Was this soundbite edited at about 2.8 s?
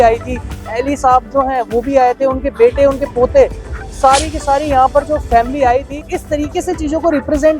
no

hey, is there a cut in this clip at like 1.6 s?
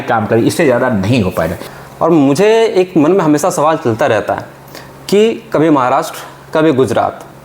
yes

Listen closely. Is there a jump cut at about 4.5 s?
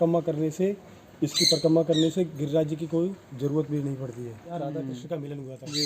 yes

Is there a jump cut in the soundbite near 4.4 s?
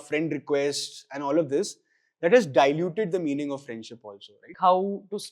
yes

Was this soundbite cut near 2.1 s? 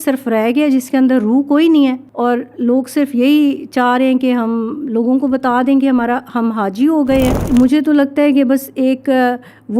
yes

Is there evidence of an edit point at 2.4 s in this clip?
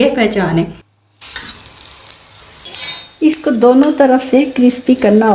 no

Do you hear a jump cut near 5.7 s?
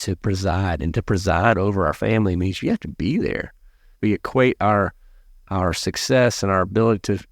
no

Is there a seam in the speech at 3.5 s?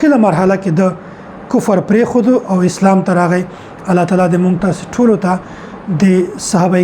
no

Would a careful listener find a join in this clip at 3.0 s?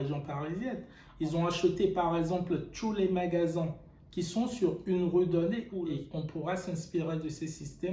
no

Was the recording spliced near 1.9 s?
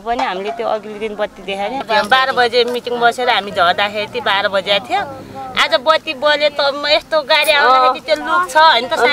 yes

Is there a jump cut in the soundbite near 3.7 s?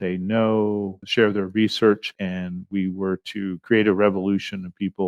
no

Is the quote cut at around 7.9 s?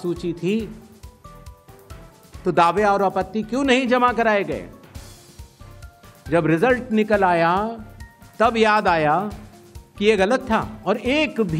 no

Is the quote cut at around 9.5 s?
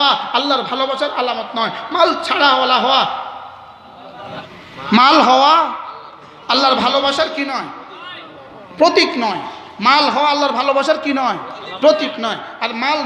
no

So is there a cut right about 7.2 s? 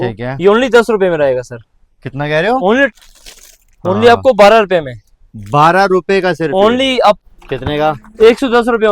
yes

